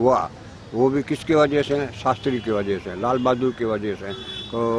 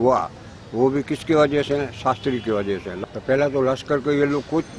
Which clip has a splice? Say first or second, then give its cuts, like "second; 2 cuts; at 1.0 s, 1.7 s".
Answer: second; 1 cut; at 2.9 s